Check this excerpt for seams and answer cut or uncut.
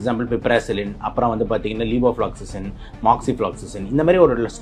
uncut